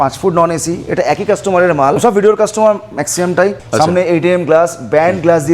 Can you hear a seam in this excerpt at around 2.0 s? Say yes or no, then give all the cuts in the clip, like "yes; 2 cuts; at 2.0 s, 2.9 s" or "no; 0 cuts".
yes; 2 cuts; at 2.0 s, 3.6 s